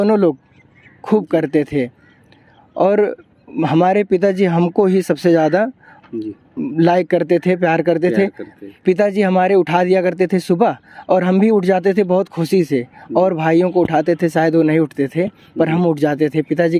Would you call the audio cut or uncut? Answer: cut